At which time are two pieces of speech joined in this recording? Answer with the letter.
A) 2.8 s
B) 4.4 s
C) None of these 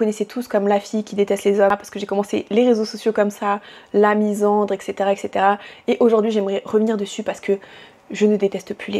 C